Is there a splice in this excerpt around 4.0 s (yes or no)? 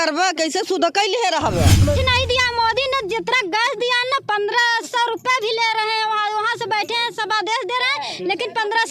no